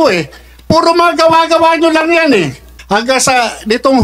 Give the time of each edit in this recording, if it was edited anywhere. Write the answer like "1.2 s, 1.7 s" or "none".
2.7 s

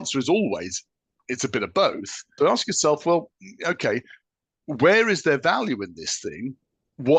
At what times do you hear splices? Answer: 2.4 s

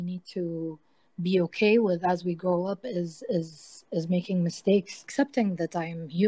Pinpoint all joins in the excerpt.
5.0 s

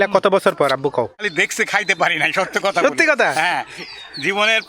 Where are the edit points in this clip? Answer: 1.2 s

